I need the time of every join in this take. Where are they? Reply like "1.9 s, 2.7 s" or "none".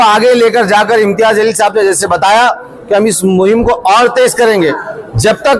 none

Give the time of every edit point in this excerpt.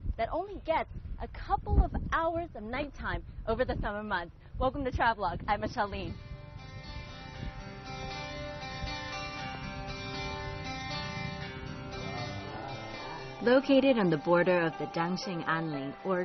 2.0 s

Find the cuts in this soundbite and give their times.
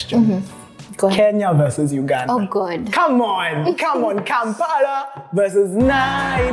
none

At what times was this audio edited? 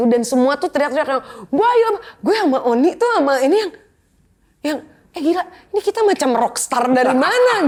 none

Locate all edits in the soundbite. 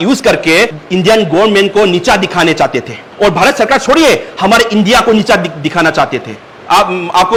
none

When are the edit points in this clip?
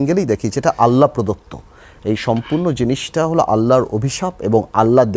none

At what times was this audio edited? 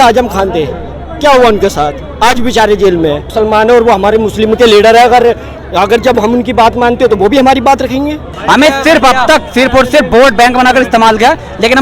3.3 s, 8.3 s

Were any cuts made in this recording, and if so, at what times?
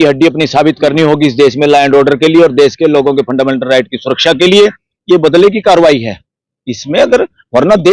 4.9 s

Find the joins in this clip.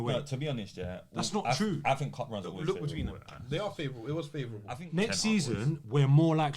4.7 s

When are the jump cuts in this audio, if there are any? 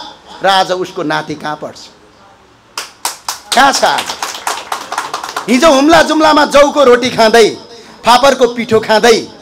none

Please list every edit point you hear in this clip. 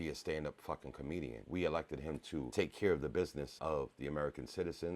1.4 s, 2.5 s, 3.5 s

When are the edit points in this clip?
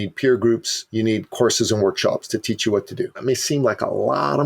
3.2 s

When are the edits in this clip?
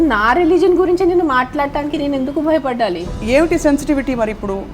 3.1 s

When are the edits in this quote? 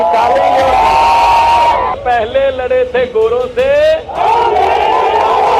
2.0 s

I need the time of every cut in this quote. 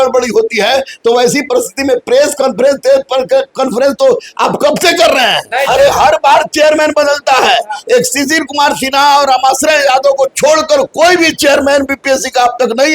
5.5 s

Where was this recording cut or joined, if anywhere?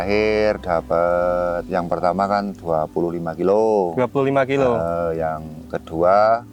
none

